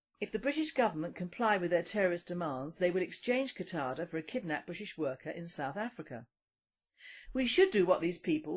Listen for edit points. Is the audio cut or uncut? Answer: cut